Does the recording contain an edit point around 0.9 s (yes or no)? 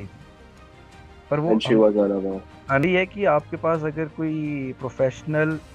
no